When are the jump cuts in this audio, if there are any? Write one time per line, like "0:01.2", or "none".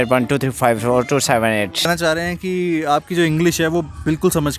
0:01.9

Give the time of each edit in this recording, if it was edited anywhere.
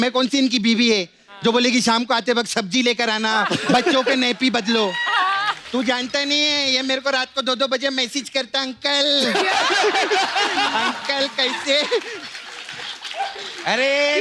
0:05.6

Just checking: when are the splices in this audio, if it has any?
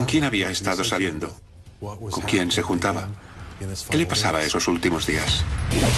none

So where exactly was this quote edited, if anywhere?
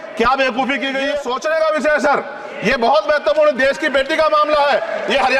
0:01.2

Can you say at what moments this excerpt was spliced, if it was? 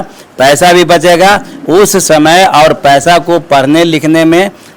none

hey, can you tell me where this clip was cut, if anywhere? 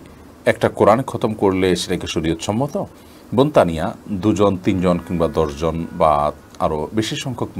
none

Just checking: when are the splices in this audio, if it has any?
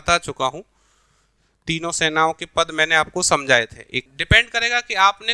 0:04.0

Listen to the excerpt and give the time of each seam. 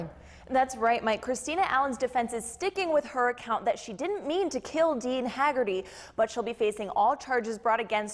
none

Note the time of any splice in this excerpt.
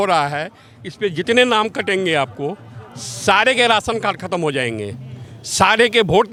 none

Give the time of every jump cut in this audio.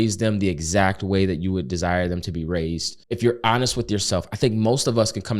0:02.9

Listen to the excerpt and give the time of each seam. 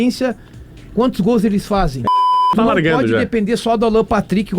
0:02.5

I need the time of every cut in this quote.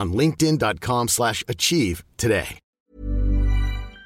0:02.8

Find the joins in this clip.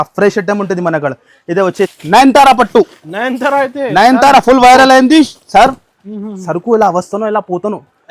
0:02.0

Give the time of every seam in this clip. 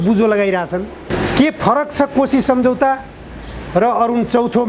0:01.1

